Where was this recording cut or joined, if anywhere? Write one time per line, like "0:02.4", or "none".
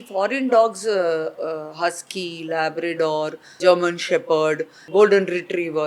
0:03.5
0:04.8

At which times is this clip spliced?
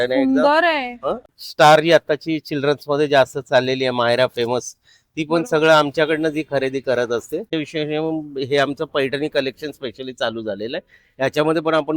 0:01.2
0:07.4

